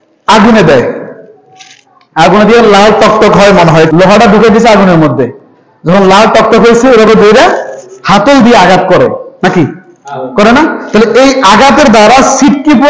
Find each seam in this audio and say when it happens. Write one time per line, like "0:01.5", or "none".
0:03.9